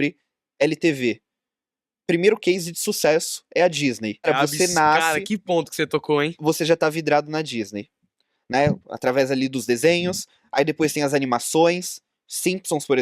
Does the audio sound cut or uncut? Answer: cut